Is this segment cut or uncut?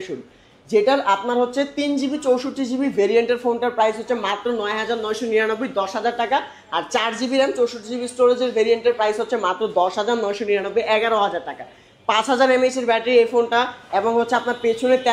uncut